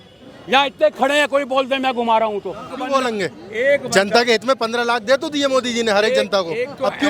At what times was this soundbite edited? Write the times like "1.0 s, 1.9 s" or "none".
2.7 s

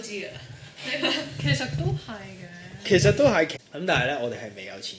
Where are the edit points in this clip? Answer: 3.6 s

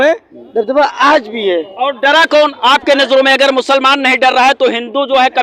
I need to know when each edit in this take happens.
none

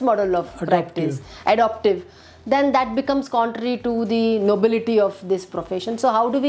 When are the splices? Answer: none

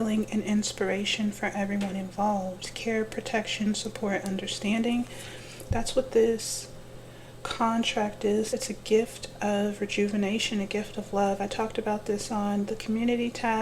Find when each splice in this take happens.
8.5 s

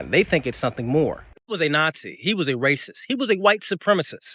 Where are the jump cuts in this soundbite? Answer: 1.3 s

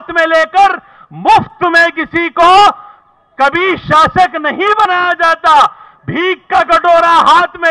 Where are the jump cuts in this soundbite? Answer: none

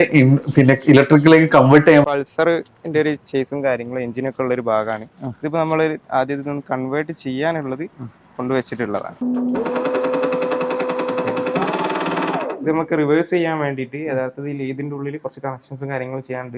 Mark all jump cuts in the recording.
2.1 s, 9.2 s

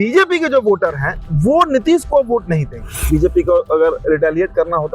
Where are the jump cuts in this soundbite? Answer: 3.1 s

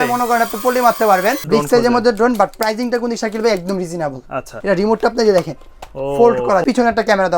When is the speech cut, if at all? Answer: 1.4 s, 4.5 s, 6.6 s

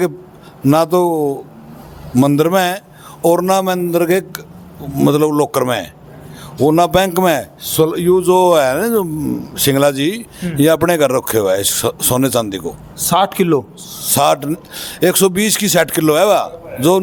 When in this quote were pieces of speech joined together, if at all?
none

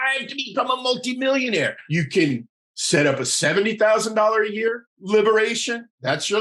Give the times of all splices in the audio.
1.8 s

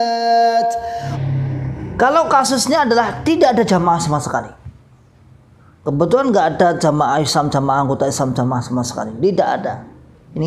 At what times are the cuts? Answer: 1.1 s

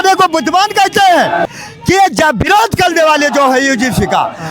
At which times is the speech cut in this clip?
1.5 s

